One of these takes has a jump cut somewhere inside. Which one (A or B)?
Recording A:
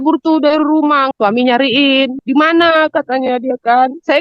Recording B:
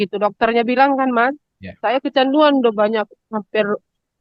A